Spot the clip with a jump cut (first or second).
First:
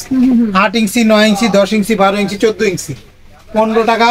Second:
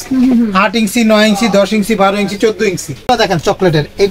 second